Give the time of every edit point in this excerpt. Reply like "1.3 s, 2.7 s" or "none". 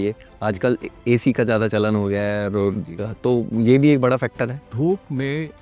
none